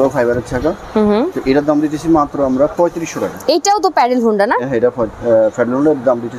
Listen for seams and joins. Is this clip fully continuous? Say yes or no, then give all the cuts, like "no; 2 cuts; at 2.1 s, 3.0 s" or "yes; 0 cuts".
yes; 0 cuts